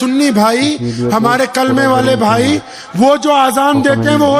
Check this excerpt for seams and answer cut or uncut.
uncut